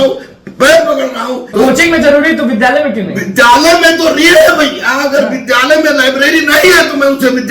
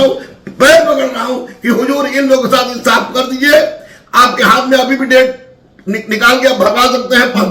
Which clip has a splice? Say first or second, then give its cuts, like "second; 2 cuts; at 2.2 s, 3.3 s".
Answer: first; 1 cut; at 1.5 s